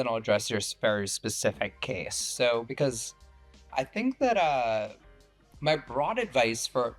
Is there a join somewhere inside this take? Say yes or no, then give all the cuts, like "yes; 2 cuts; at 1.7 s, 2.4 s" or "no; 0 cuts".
yes; 1 cut; at 5.6 s